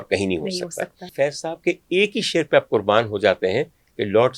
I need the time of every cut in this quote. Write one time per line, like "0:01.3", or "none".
0:01.1

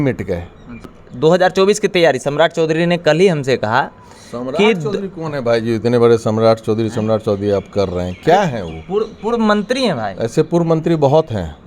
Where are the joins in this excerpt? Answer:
0:01.0

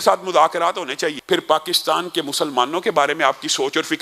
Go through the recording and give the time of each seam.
0:01.2

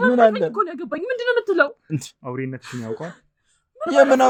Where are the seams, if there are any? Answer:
none

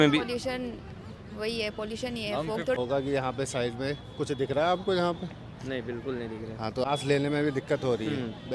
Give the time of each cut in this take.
0:02.8
0:06.8

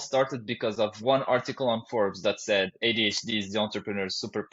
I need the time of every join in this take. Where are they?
0:01.0

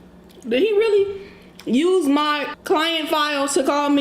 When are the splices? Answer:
0:02.5

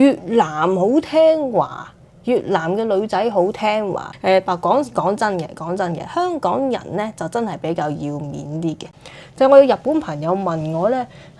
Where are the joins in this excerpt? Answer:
0:04.0
0:09.0

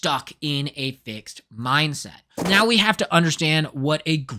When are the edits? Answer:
0:02.4

